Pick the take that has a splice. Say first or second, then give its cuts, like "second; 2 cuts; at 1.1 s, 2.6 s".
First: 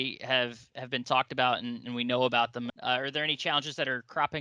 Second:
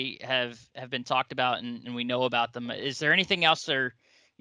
first; 1 cut; at 2.7 s